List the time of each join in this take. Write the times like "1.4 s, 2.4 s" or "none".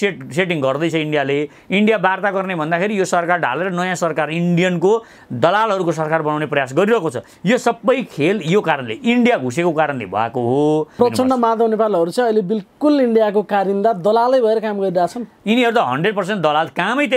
10.9 s